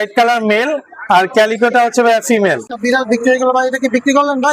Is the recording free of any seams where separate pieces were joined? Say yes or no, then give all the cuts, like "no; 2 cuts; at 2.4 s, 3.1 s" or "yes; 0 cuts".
no; 1 cut; at 2.7 s